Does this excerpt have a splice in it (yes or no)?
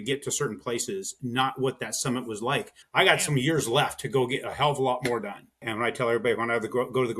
yes